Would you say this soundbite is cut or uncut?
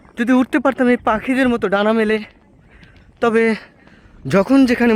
uncut